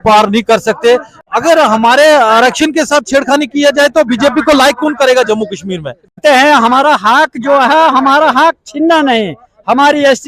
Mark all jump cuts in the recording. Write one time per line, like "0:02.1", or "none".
0:01.2
0:06.2

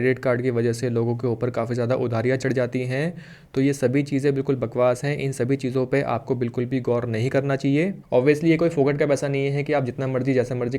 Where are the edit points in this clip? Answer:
0:08.0

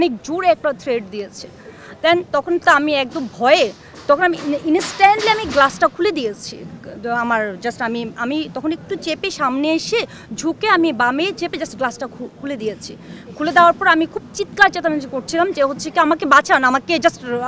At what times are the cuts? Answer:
none

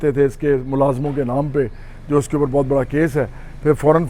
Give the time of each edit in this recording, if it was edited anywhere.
none

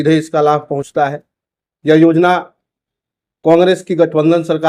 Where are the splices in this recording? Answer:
none

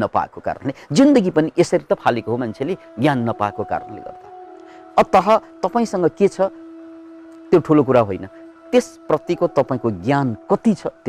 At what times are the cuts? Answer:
none

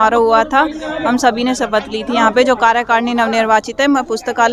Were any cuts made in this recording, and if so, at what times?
none

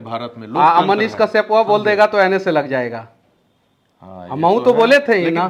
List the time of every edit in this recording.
none

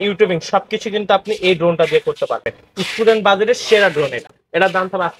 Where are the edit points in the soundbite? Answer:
none

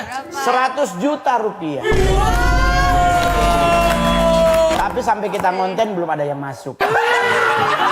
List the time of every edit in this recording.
0:04.7

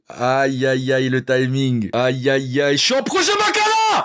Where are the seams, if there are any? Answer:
none

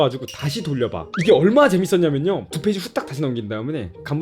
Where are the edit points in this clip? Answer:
0:01.0
0:02.5

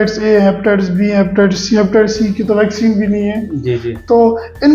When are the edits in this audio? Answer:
none

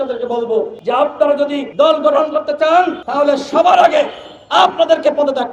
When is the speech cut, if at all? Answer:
none

